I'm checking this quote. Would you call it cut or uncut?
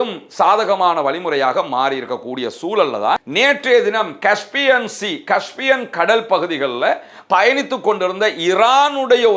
uncut